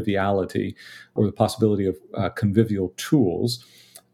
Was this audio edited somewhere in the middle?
yes; 1 cut; at 1.1 s

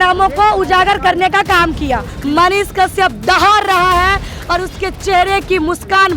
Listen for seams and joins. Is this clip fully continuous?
no; 1 cut; at 2.1 s

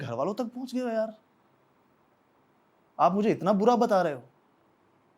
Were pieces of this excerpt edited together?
no; 0 cuts

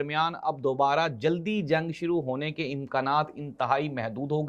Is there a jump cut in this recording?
no; 0 cuts

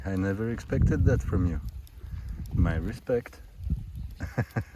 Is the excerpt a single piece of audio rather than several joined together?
yes; 0 cuts

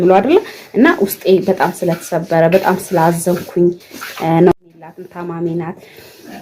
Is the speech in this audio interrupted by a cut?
yes; 1 cut; at 4.5 s

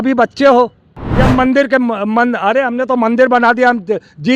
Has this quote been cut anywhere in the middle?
yes; 1 cut; at 1.0 s

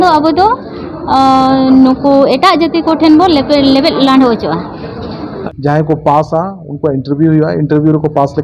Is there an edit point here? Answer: yes; 1 cut; at 5.3 s

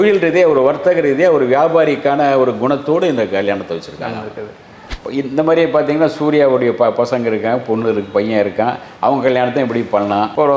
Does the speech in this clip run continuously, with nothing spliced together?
no; 1 cut; at 4.8 s

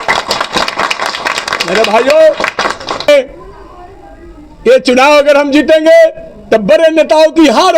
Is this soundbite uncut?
no; 1 cut; at 3.1 s

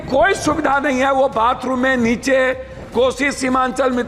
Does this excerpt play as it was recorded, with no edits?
yes; 0 cuts

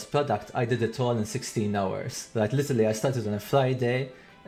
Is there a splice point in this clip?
no; 0 cuts

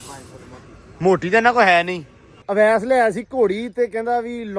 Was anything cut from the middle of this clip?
yes; 1 cut; at 2.4 s

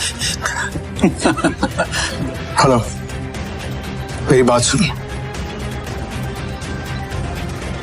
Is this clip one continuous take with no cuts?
no; 2 cuts; at 2.0 s, 5.8 s

